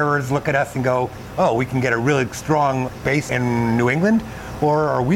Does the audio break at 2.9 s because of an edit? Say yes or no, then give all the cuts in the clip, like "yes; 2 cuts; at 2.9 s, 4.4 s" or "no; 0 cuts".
yes; 1 cut; at 2.9 s